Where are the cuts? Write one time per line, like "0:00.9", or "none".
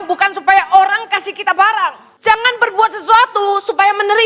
0:02.1

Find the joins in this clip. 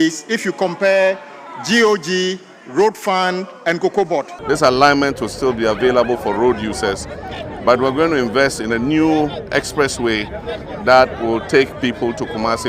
0:04.4

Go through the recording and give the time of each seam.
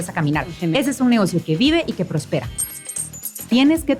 0:03.0

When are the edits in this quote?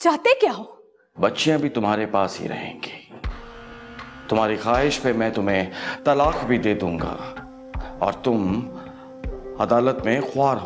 none

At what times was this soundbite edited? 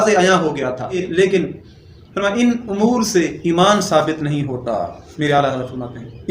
0:01.1
0:05.0

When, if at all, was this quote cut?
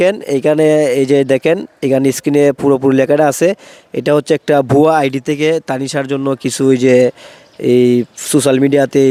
none

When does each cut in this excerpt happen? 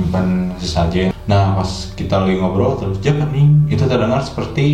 0:01.1

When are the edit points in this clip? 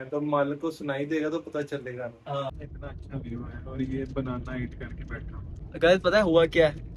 0:02.5
0:05.6

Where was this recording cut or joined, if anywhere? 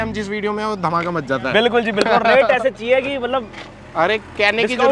none

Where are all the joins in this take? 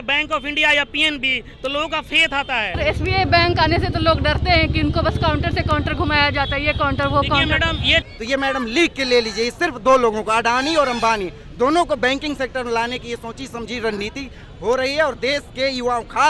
0:02.8
0:08.0

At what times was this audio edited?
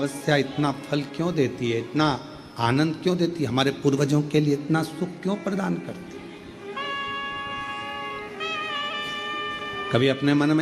0:06.0

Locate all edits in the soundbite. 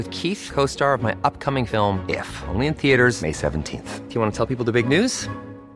none

